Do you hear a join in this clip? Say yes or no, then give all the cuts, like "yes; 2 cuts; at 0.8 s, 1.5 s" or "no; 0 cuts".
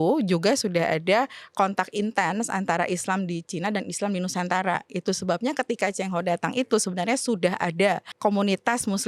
no; 0 cuts